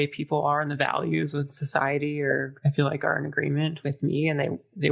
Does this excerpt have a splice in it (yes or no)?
no